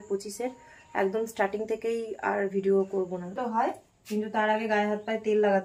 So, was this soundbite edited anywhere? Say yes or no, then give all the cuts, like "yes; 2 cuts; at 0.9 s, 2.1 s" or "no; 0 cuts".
yes; 1 cut; at 3.4 s